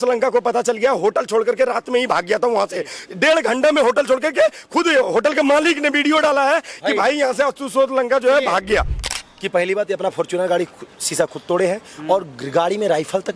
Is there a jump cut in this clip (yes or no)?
yes